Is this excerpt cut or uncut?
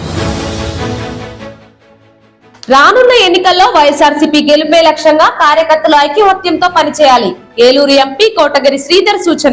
uncut